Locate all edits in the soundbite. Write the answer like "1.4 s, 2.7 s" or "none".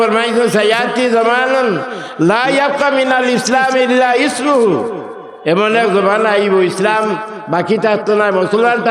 none